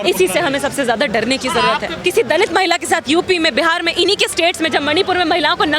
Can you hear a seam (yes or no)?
yes